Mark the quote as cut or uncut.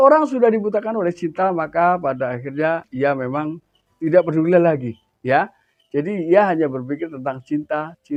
uncut